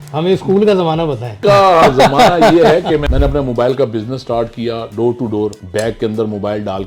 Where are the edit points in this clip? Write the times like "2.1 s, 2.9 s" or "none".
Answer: 1.4 s, 3.1 s, 5.6 s